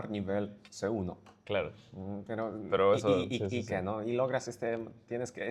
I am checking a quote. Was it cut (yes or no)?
no